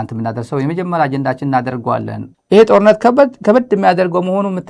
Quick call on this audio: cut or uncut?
cut